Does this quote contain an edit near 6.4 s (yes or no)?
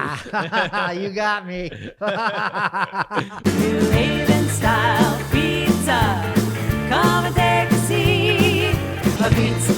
no